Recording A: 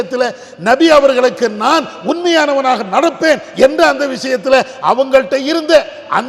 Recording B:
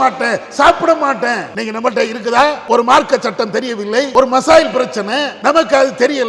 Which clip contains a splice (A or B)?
B